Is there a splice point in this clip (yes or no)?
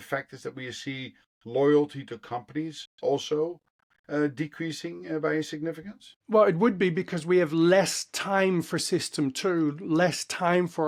no